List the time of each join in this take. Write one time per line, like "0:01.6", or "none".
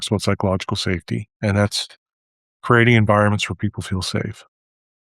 0:01.3